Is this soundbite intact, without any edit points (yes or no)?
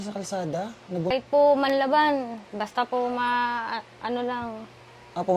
no